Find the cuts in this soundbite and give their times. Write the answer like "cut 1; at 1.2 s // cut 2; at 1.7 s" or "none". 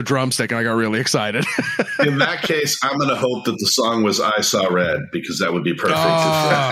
cut 1; at 2.0 s